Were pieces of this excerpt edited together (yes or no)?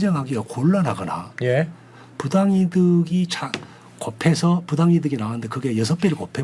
no